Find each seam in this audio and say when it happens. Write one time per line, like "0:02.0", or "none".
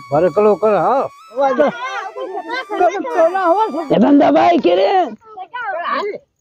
0:01.4
0:03.8